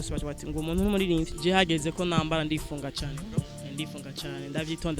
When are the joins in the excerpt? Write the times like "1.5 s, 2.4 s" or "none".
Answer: 1.3 s